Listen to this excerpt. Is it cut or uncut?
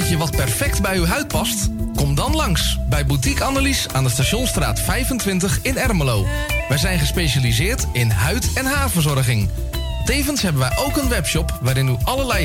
uncut